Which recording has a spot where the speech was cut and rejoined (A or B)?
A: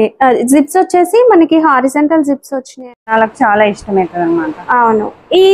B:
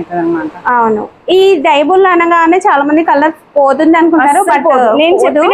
A